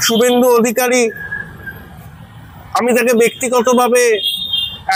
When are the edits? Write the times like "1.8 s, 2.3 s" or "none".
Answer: none